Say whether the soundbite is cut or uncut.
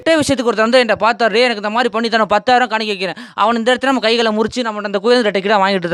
uncut